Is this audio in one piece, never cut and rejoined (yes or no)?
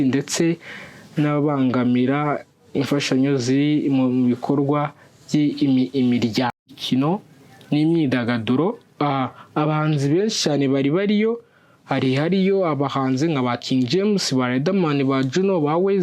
no